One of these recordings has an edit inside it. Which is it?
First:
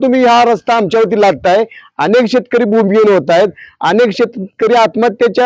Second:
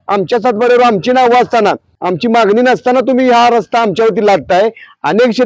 second; 1 cut; at 1.9 s

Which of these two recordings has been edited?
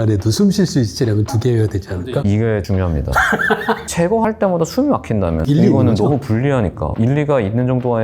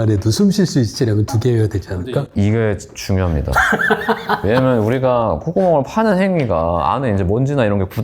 first; 4 cuts; at 2.3 s, 3.9 s, 5.4 s, 6.8 s

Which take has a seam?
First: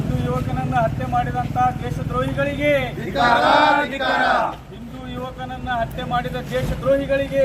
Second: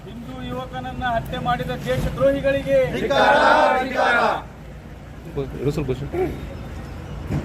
second; 1 cut; at 5.3 s

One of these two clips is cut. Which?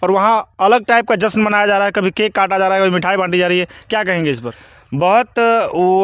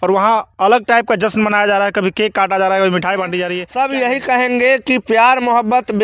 second; 1 cut; at 3.6 s

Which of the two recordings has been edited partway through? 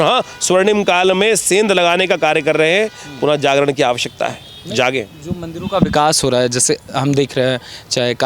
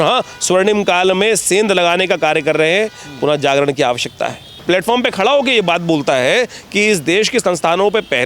second; 1 cut; at 4.5 s

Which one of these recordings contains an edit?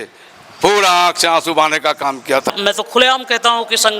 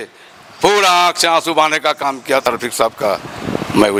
first; 1 cut; at 2.5 s

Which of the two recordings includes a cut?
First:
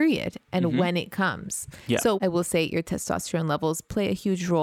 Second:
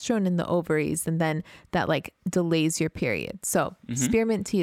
first; 1 cut; at 2.2 s

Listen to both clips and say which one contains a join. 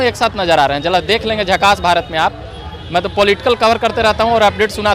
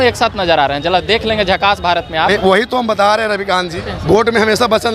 second; 2 cuts; at 2.3 s, 3.7 s

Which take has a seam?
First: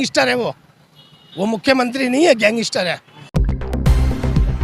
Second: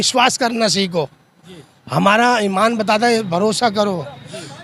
first; 1 cut; at 3.3 s

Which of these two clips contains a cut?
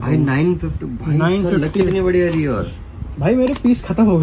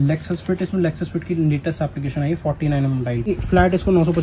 second; 1 cut; at 3.3 s

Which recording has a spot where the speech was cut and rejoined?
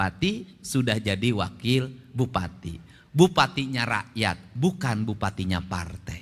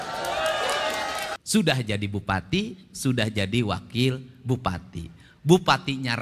second; 1 cut; at 1.4 s

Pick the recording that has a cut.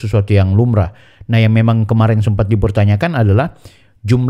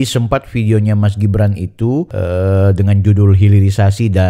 second; 1 cut; at 2.1 s

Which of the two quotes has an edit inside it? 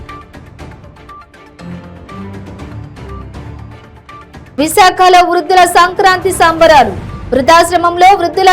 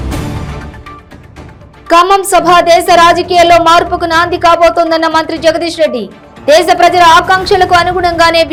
first; 1 cut; at 0.9 s

